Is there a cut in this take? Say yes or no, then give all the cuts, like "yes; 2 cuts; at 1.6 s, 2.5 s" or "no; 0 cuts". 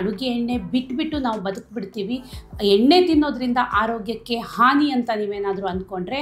no; 0 cuts